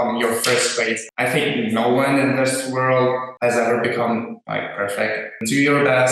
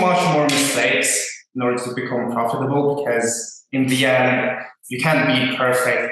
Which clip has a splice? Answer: first; 4 cuts; at 1.0 s, 3.3 s, 4.4 s, 5.4 s

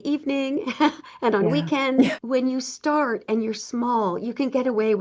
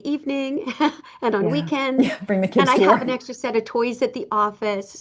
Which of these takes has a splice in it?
first; 1 cut; at 2.2 s

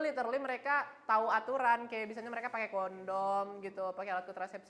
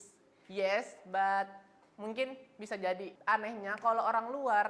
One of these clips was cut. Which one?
second; 1 cut; at 3.1 s

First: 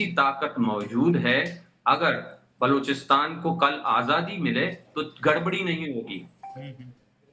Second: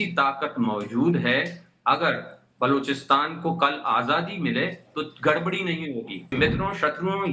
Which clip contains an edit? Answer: second; 1 cut; at 6.3 s

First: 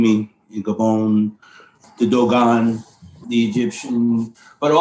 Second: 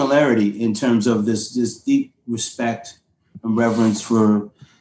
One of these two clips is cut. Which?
first; 2 cuts; at 1.8 s, 3.2 s

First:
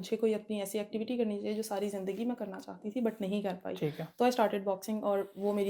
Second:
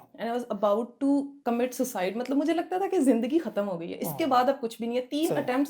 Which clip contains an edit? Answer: second; 1 cut; at 1.3 s

